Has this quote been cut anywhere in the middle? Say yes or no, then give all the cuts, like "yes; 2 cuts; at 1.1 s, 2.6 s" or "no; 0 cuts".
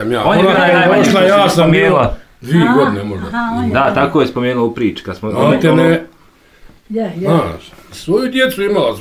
yes; 1 cut; at 7.9 s